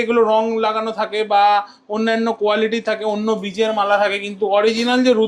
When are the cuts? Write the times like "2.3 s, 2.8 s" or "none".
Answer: none